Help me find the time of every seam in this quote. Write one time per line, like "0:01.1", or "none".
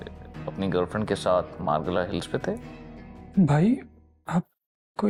none